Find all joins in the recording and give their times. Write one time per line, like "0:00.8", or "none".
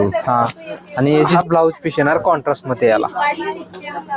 0:01.4